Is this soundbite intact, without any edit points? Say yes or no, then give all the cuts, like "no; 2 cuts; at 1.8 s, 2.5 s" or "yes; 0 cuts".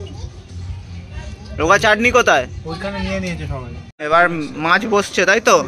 no; 1 cut; at 3.9 s